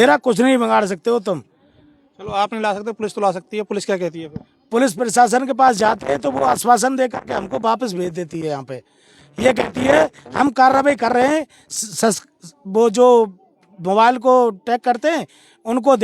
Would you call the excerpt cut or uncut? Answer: uncut